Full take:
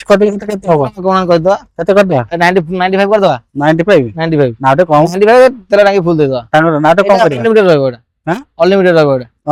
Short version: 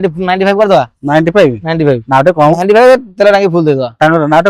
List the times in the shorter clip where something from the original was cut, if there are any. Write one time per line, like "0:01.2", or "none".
none